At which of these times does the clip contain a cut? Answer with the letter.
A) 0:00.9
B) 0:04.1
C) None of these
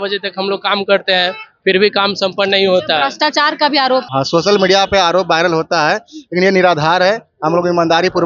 B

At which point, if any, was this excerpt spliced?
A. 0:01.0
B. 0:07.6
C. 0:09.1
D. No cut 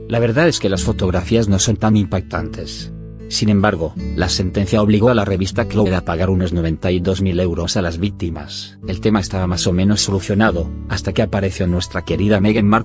A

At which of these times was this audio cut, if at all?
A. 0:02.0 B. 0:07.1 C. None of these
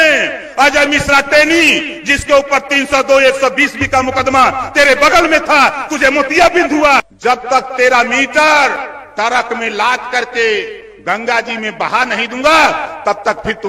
B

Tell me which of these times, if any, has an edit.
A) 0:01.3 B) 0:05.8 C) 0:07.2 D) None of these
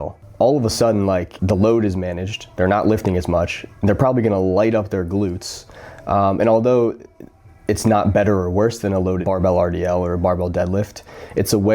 A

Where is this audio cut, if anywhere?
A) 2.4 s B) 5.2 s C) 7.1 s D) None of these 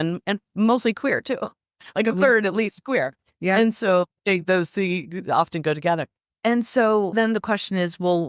C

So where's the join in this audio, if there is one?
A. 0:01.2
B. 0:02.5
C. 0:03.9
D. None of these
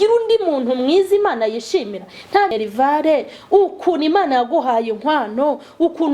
B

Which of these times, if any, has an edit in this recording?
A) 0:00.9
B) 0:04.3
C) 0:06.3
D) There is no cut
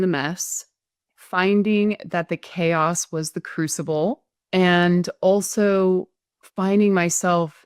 B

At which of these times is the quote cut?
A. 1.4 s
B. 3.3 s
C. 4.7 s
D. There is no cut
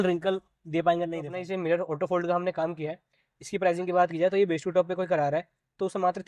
A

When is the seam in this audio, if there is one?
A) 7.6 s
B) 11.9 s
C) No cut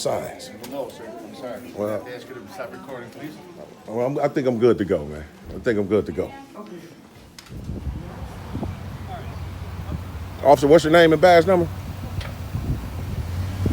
A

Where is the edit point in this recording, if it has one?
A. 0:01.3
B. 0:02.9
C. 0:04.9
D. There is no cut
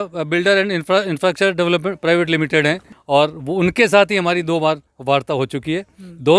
B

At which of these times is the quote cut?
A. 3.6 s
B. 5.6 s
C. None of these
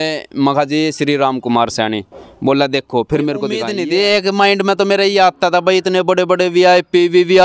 A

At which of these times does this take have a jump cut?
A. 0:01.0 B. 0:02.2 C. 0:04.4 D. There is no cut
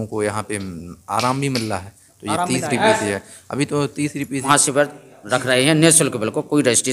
C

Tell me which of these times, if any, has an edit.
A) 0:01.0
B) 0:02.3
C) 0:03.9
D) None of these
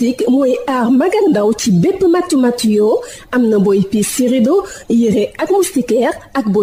D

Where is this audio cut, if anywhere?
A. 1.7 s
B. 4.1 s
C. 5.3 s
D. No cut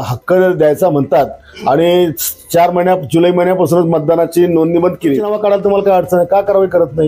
C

